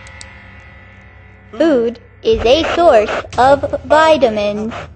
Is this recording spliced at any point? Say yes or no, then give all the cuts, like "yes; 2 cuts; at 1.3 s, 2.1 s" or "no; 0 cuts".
yes; 1 cut; at 1.5 s